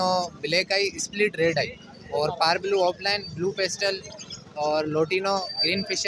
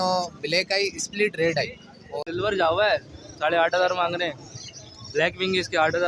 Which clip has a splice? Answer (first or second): second